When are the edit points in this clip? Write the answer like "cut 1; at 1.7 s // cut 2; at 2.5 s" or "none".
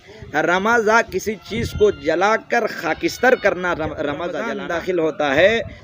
cut 1; at 4.4 s

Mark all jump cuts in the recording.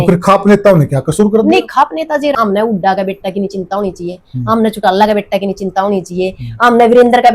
cut 1; at 2.3 s

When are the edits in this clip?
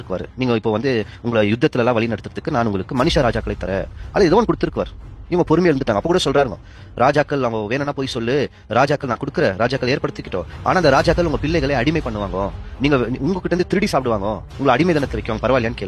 cut 1; at 2.1 s

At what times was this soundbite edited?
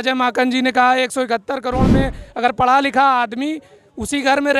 none

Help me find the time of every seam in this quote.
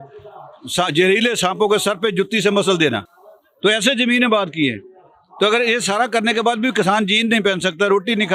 none

